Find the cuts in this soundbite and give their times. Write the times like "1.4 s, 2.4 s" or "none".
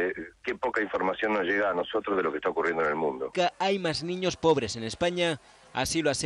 3.3 s